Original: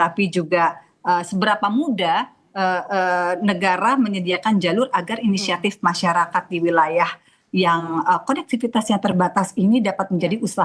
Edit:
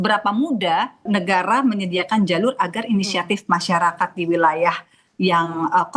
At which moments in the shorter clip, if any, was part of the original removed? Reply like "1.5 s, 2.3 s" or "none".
1.0 s